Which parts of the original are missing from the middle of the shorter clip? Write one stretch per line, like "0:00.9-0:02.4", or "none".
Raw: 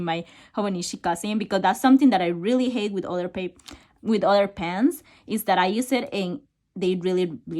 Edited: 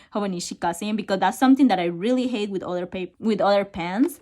0:03.5-0:03.9